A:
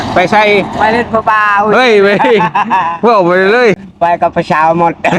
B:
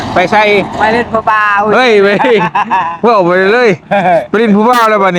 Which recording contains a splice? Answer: A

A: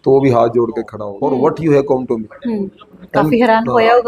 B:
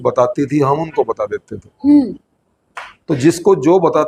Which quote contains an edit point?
A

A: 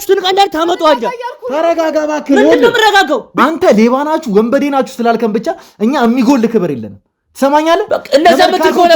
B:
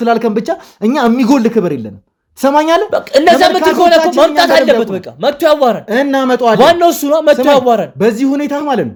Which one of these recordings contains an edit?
A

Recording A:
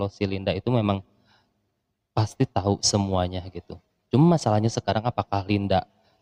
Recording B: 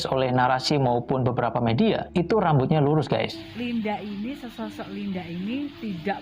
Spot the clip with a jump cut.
B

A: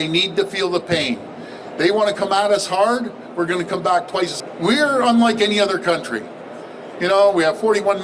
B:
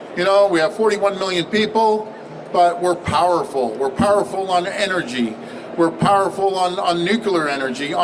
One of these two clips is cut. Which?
A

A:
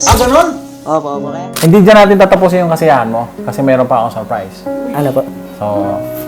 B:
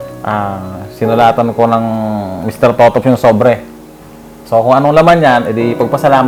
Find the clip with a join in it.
A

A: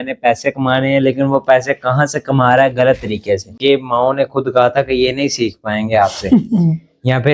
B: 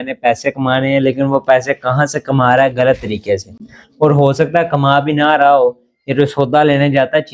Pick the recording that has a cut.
A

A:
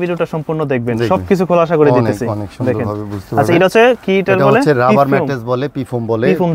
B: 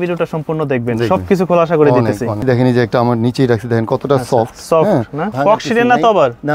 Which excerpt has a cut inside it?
B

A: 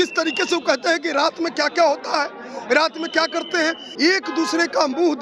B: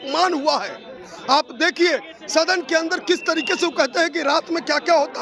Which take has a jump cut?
A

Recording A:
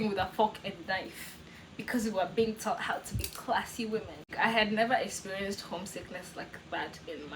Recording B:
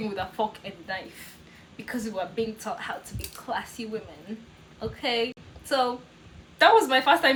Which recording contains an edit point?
A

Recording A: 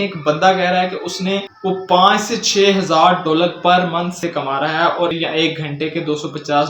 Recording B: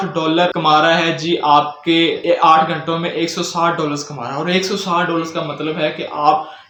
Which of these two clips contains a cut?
A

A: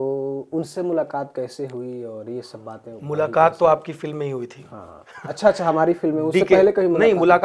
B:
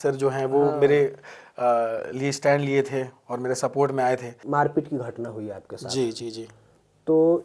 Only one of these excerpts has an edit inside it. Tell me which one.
B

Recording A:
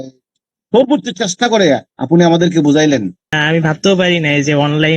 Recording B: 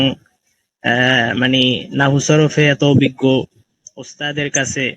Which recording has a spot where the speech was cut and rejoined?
A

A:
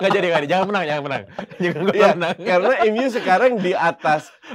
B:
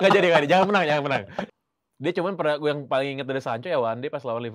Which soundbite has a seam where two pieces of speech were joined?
B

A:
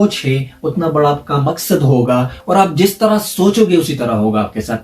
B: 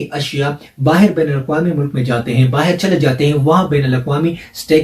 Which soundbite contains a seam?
A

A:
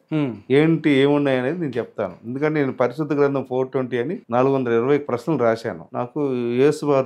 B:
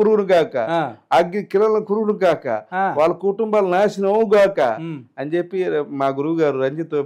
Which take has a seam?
A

